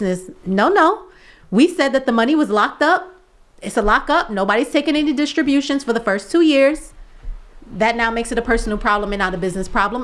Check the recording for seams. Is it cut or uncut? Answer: uncut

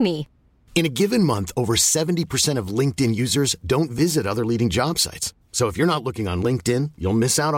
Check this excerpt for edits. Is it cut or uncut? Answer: uncut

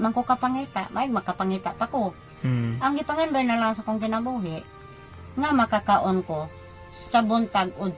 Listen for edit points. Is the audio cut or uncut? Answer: uncut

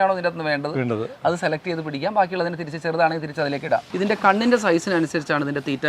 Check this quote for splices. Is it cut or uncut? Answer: cut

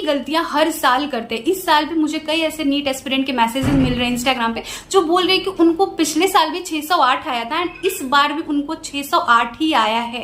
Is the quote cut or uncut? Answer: uncut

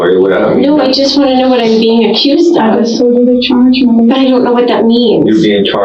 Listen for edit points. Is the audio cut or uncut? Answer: uncut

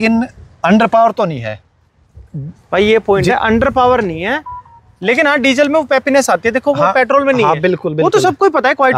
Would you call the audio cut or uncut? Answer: uncut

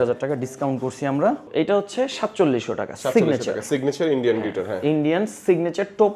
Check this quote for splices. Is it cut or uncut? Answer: cut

